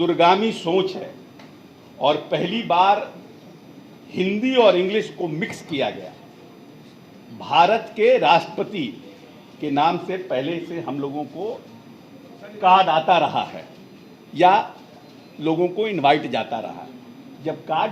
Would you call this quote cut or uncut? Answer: uncut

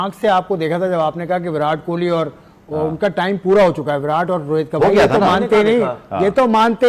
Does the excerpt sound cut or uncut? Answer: uncut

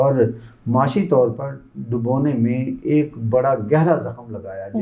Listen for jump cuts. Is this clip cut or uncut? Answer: uncut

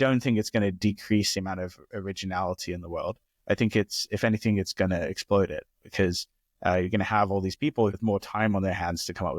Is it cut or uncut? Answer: cut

